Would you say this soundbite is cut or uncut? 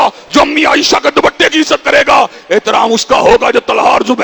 uncut